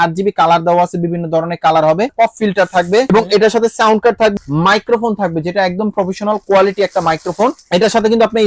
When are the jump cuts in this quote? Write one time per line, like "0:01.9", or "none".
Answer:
0:02.1
0:03.1
0:04.3
0:07.6